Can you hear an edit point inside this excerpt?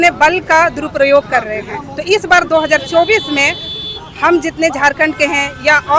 no; 0 cuts

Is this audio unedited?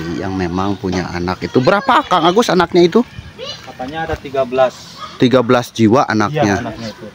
yes; 0 cuts

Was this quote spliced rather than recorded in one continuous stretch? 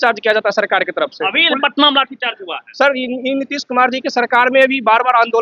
no; 0 cuts

